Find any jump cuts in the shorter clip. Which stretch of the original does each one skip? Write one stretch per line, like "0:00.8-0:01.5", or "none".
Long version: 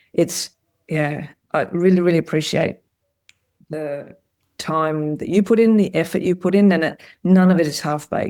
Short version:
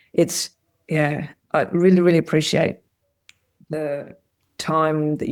none